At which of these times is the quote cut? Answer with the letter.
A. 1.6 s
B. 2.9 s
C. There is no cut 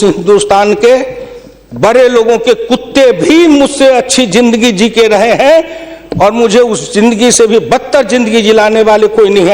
C